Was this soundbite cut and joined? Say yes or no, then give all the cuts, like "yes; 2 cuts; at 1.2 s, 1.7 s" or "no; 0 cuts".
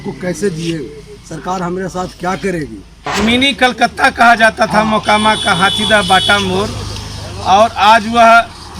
yes; 1 cut; at 3.1 s